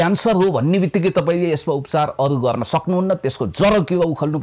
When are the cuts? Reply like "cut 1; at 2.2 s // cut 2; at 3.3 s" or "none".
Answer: none